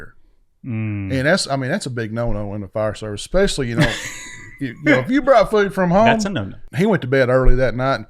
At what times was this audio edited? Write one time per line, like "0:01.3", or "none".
0:06.6